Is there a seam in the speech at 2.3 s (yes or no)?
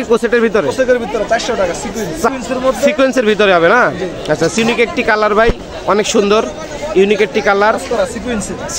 yes